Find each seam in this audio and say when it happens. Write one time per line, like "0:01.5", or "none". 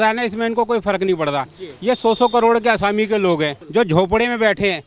0:03.6